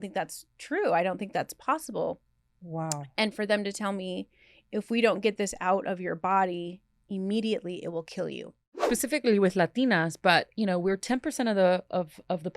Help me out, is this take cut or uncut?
cut